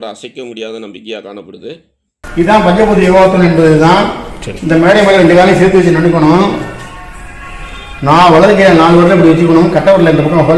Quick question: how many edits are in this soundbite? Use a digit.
1